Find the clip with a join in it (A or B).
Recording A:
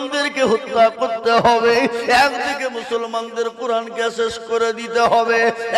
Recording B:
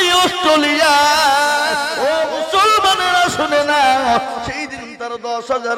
B